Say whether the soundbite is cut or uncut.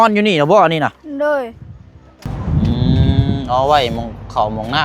cut